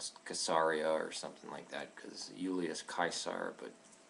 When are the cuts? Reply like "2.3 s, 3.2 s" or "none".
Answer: 2.3 s